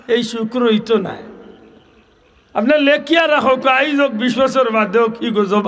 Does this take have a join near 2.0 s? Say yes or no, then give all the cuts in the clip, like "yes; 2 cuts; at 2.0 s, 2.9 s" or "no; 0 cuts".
no; 0 cuts